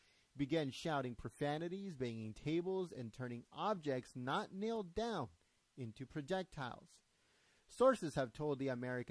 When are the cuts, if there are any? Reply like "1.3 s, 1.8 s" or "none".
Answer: 5.4 s